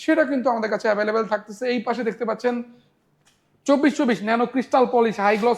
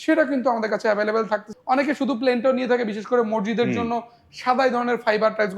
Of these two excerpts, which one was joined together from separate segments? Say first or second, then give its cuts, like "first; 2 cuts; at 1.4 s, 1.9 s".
second; 1 cut; at 1.5 s